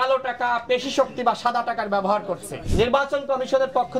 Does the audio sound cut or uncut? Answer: cut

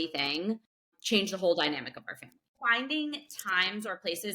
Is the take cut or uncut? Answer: cut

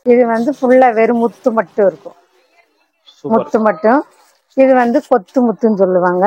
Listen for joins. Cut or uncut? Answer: uncut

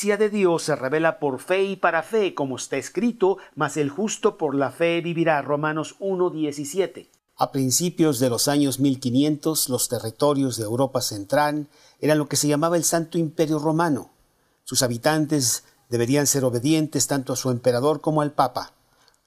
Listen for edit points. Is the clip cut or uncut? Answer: cut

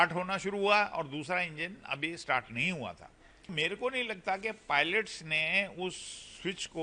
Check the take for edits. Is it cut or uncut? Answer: cut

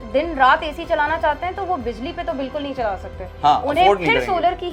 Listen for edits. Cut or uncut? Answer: uncut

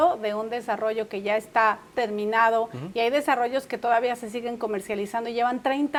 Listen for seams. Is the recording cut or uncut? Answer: uncut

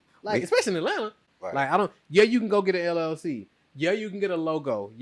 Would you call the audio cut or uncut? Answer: cut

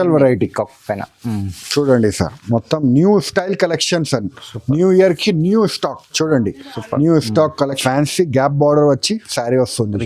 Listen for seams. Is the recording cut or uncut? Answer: cut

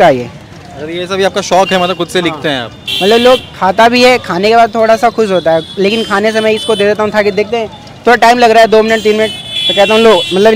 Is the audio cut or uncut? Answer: uncut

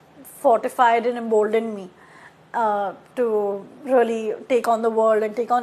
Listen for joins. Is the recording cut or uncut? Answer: uncut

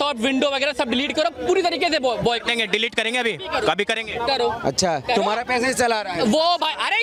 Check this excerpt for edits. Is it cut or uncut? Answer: uncut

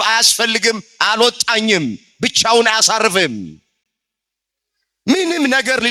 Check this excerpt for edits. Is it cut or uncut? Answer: uncut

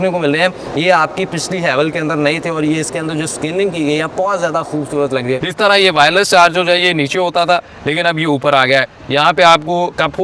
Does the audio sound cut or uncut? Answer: cut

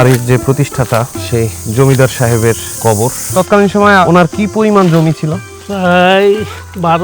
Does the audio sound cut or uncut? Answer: cut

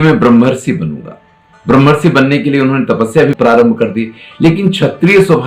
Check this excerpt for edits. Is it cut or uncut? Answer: uncut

